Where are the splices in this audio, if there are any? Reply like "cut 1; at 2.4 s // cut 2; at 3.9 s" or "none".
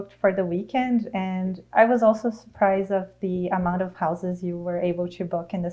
none